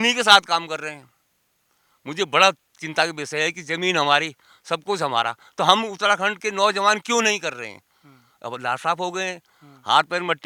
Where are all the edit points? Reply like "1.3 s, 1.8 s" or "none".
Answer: none